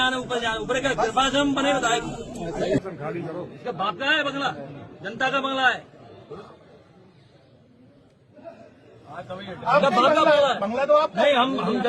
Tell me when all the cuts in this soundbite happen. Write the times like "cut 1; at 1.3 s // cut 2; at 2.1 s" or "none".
cut 1; at 2.8 s // cut 2; at 9.6 s